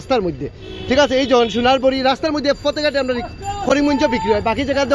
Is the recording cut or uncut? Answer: uncut